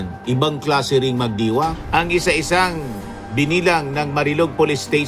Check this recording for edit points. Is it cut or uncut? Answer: cut